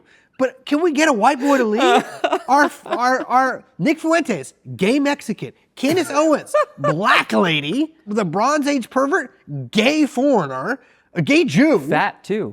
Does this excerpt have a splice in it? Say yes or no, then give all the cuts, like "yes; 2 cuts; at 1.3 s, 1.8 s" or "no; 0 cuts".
yes; 1 cut; at 8.1 s